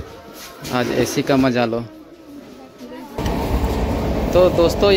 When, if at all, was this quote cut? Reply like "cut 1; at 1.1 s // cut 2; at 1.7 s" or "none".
cut 1; at 3.2 s